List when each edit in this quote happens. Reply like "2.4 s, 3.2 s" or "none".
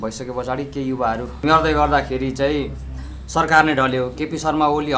1.4 s